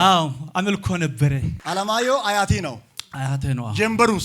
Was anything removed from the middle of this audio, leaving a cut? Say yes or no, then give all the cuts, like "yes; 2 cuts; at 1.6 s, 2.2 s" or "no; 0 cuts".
yes; 1 cut; at 1.6 s